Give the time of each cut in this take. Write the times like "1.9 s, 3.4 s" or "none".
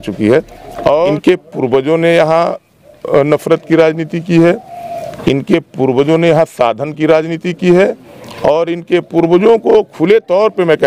1.1 s